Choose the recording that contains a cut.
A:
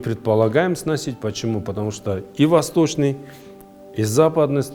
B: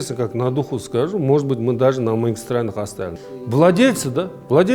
B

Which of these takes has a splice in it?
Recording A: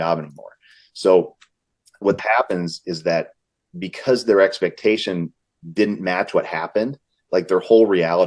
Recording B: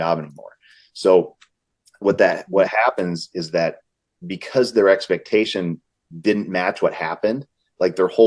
A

